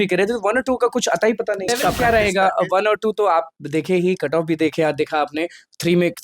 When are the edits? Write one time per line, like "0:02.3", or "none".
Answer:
0:01.7